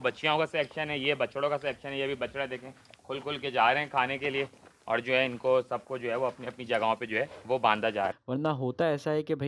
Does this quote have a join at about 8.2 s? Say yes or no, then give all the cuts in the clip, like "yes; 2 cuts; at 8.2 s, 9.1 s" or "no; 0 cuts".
yes; 1 cut; at 8.2 s